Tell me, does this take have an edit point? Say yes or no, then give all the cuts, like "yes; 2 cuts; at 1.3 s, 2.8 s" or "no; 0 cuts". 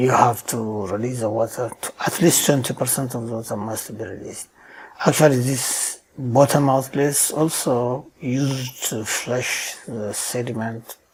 no; 0 cuts